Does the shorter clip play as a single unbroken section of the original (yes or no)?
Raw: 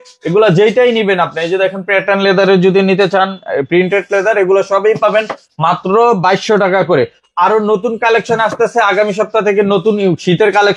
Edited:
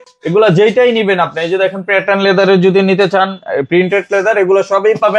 yes